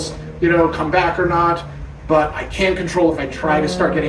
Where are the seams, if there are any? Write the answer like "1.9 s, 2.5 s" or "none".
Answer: none